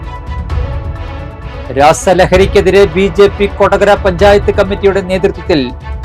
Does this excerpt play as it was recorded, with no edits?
no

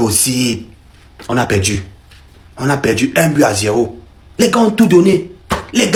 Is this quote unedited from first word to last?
yes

